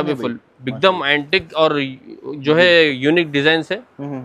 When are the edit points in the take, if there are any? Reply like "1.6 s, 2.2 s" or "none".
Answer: none